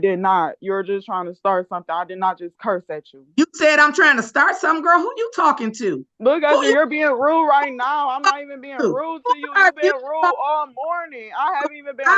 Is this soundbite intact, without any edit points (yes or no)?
no